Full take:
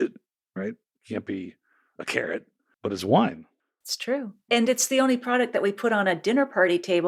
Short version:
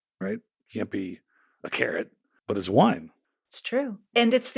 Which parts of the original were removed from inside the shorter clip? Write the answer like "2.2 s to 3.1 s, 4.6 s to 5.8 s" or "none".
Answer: none